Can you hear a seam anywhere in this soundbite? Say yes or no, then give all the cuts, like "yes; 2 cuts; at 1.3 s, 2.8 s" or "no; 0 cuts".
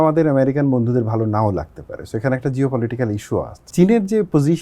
yes; 1 cut; at 3.7 s